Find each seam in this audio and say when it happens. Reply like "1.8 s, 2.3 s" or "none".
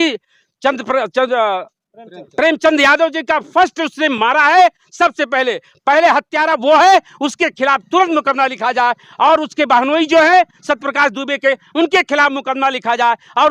none